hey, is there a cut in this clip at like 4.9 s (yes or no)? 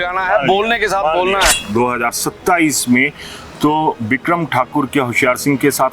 no